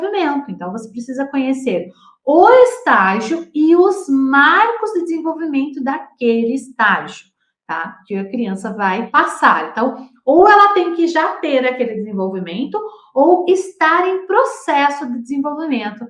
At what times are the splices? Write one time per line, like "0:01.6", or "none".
0:09.1